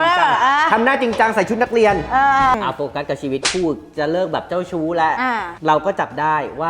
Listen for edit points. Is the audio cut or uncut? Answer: cut